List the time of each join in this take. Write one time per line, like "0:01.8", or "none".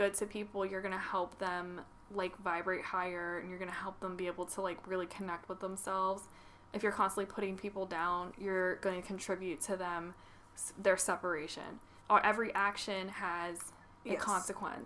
0:11.9